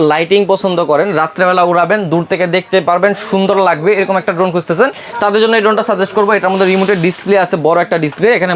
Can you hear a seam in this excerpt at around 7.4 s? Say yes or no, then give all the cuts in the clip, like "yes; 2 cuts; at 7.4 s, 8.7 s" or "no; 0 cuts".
no; 0 cuts